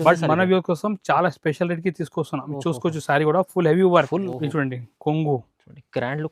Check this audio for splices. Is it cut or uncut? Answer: cut